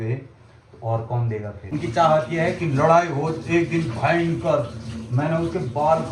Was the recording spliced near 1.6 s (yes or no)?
yes